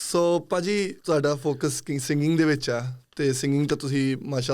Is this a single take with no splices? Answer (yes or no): no